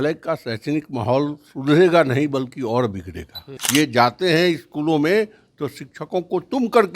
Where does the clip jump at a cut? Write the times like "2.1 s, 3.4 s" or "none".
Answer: 3.5 s